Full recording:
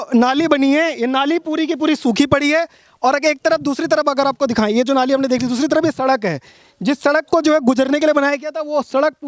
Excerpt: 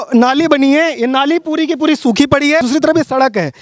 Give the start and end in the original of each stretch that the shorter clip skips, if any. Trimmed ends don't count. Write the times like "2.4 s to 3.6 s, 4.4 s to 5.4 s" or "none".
2.6 s to 5.5 s

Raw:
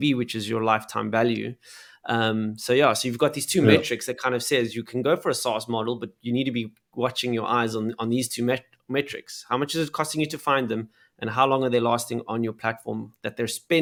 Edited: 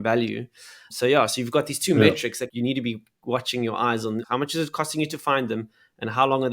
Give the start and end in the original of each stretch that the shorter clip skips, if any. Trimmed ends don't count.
2.0 s to 2.5 s, 4.1 s to 6.1 s, 7.9 s to 9.4 s

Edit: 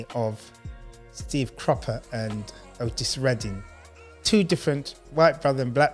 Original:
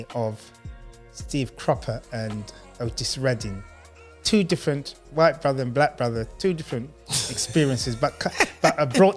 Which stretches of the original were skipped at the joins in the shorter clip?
none

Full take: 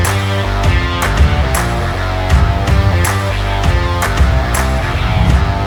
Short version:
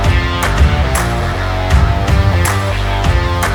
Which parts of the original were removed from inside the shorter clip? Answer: none

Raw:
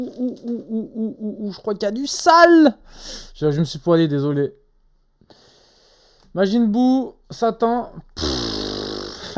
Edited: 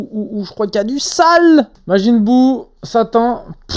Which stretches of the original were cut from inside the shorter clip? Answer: 2.8 s to 6.2 s

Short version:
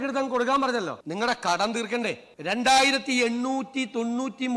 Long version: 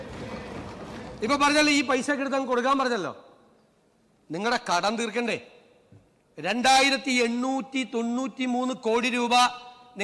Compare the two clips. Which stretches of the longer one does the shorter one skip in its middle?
3.2 s to 4.2 s, 5.5 s to 6.3 s

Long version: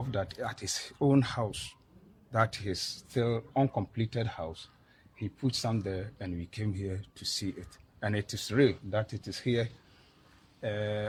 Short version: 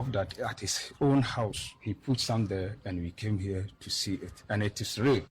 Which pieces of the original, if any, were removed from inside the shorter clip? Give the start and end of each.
1.7 s to 5.0 s, 7.7 s to 7.9 s

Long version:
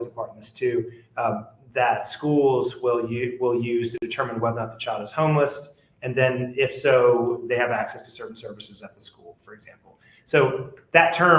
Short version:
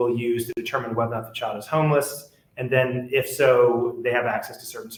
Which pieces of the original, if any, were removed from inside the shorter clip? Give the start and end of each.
none

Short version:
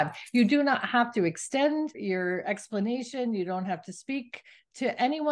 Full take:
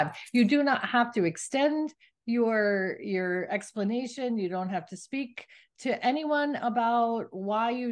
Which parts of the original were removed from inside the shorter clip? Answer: 2.0 s to 3.0 s

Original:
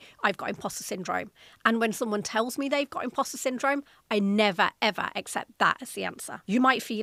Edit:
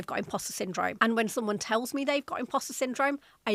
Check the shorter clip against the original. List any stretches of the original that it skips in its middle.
1.3 s to 1.6 s

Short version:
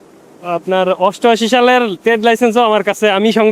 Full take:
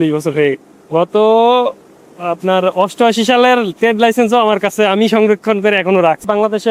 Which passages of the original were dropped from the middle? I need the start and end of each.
none

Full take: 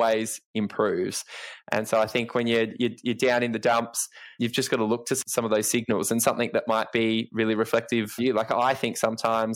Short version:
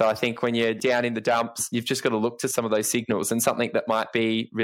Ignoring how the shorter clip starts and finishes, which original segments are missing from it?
2.7 s to 3.2 s, 4.0 s to 4.3 s, 5.2 s to 5.3 s

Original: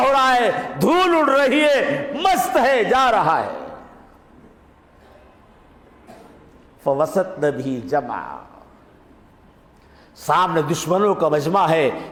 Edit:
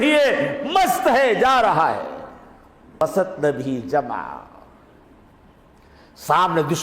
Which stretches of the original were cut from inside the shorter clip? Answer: 4.5 s to 7.0 s

